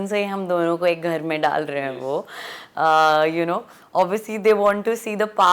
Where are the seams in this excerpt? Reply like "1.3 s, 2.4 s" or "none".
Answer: none